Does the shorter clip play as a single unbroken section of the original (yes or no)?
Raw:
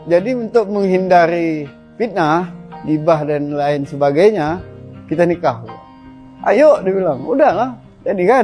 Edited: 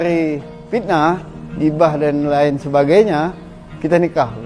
yes